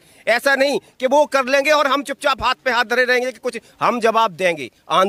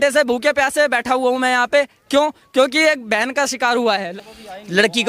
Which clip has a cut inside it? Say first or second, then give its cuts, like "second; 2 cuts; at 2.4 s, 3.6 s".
second; 1 cut; at 4.1 s